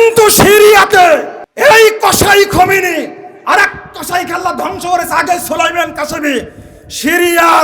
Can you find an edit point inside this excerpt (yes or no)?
yes